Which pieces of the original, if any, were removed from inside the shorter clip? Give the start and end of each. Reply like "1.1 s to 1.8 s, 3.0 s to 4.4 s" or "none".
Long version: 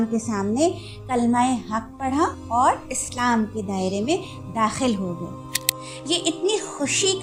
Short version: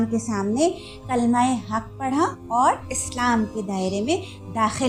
none